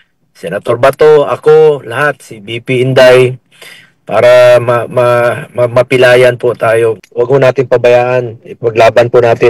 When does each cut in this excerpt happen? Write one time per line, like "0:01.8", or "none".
0:07.0